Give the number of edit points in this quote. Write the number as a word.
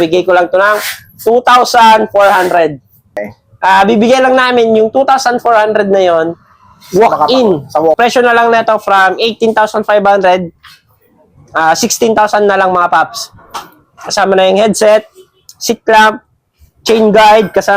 two